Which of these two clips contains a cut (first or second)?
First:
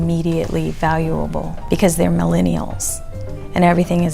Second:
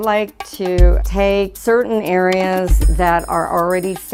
first